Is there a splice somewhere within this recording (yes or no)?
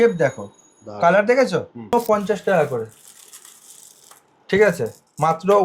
yes